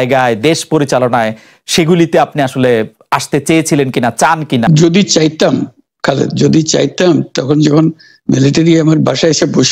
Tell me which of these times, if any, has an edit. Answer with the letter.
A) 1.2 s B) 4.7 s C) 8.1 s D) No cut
B